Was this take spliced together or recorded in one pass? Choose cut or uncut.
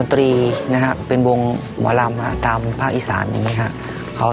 uncut